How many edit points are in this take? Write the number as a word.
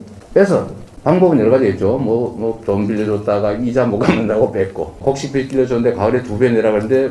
one